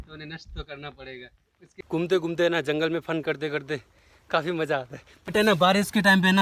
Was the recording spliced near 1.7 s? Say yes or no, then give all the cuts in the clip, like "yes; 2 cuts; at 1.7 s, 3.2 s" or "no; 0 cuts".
yes; 2 cuts; at 1.7 s, 5.1 s